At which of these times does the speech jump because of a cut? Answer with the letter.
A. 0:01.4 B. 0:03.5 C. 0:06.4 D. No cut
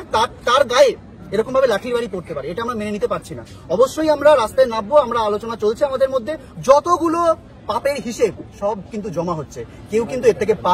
C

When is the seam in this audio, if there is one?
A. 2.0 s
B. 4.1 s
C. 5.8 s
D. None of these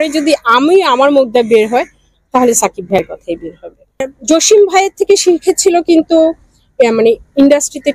B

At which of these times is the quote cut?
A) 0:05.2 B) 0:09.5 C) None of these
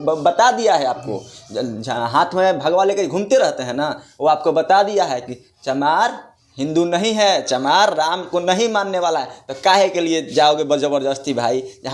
C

